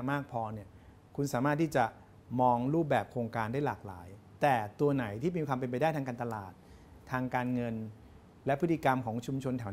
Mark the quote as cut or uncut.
uncut